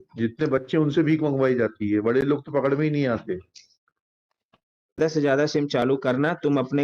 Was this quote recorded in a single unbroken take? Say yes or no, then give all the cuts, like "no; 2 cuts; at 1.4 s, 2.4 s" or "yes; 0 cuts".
no; 1 cut; at 5.0 s